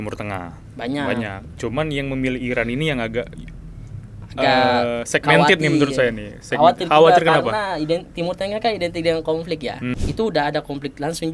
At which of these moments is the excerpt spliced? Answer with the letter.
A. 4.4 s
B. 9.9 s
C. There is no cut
B